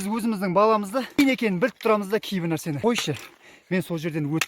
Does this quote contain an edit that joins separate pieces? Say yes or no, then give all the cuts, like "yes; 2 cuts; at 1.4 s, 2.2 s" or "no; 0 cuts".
yes; 2 cuts; at 1.2 s, 2.8 s